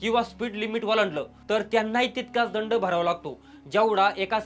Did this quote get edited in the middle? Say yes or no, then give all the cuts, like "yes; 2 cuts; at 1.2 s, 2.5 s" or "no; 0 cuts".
no; 0 cuts